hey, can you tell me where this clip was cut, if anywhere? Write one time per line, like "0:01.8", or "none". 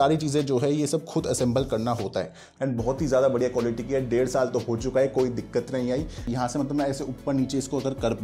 0:02.4
0:06.3